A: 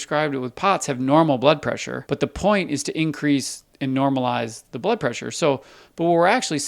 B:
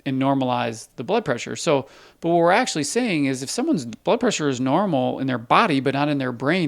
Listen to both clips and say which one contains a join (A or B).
A